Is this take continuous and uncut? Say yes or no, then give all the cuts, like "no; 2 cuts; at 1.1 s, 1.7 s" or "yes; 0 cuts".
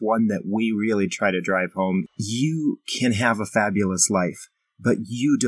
no; 1 cut; at 2.1 s